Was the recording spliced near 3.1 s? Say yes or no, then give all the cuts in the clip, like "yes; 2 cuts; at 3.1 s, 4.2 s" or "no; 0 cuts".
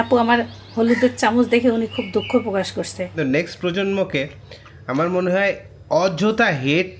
yes; 1 cut; at 3.1 s